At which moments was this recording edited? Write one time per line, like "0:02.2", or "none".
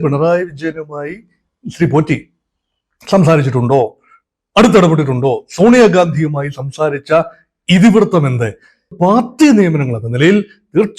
0:08.9